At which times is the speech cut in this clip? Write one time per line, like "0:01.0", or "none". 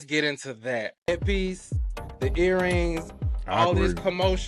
0:01.1